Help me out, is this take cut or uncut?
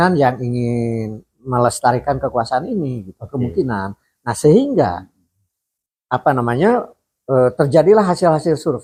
uncut